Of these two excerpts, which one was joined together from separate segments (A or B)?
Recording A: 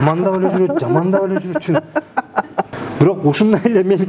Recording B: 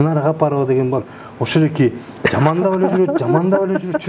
A